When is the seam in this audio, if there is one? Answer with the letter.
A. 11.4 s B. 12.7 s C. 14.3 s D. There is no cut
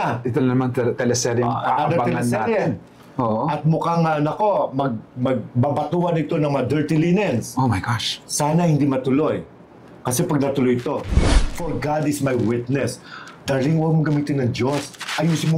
A